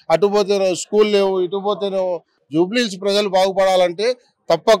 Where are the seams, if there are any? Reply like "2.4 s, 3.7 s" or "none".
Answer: 2.3 s